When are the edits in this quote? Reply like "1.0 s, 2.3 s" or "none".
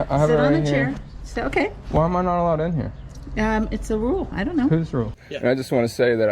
5.2 s